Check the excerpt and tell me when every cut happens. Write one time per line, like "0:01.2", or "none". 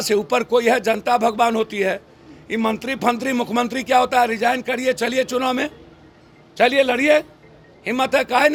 none